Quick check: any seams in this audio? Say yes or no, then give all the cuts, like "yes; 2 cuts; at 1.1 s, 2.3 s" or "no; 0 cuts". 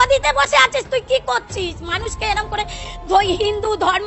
no; 0 cuts